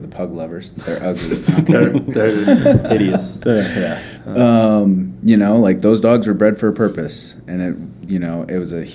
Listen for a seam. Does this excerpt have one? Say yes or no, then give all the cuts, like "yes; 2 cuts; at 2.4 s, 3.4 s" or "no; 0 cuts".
no; 0 cuts